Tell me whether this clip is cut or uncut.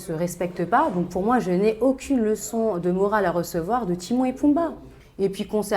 uncut